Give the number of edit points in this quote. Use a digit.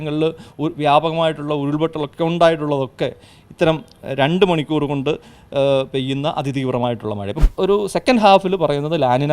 1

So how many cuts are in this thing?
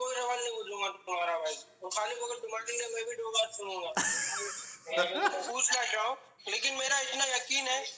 1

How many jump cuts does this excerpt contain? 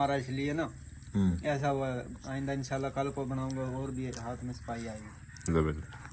0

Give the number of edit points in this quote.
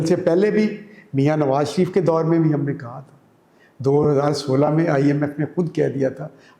0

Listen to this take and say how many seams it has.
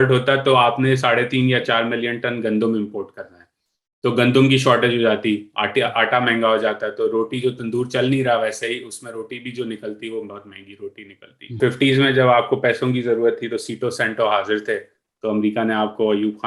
1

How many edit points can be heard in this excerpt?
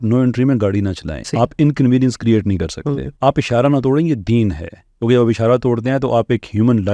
2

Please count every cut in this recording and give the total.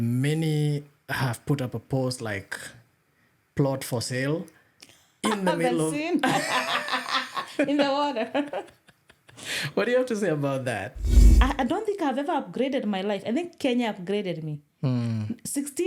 1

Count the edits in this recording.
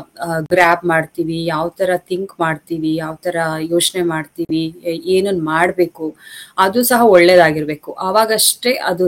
0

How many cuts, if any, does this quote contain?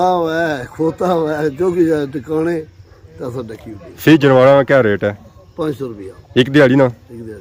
0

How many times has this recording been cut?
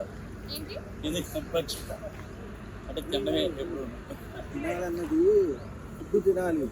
1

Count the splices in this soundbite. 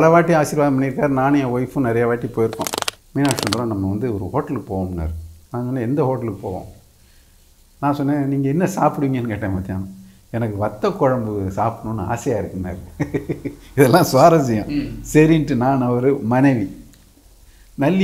1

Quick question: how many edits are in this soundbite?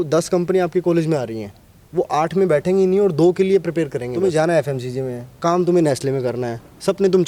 1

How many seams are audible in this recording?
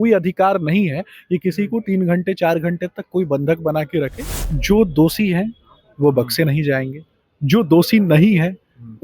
1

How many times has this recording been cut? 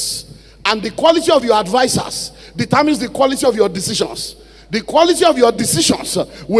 0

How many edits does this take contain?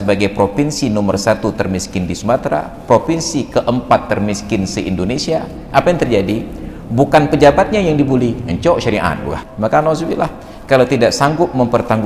1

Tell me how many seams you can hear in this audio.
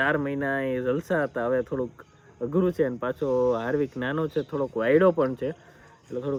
0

